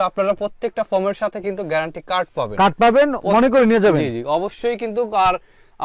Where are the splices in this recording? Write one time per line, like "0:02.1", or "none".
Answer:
none